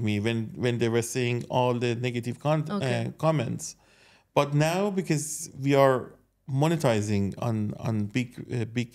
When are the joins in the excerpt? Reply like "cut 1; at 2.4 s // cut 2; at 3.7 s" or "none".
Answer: none